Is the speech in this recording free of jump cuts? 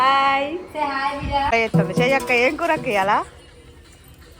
no; 1 cut; at 1.5 s

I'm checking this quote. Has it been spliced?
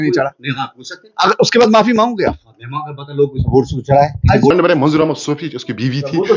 yes; 1 cut; at 4.5 s

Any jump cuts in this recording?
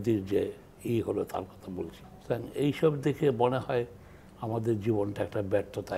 yes; 1 cut; at 2.1 s

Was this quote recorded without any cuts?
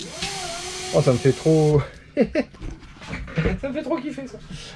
yes; 0 cuts

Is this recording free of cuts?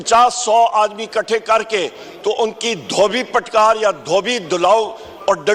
yes; 0 cuts

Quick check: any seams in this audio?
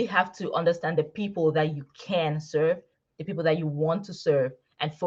no; 0 cuts

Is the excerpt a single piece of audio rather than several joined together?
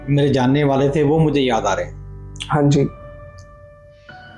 no; 1 cut; at 3.2 s

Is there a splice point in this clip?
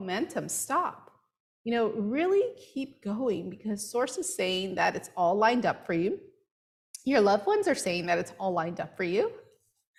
no; 0 cuts

